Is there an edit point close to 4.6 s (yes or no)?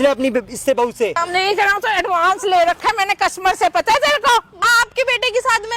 yes